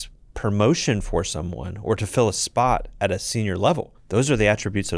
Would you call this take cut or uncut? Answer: cut